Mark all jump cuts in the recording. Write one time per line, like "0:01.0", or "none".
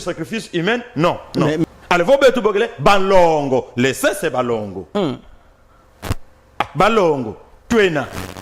0:01.6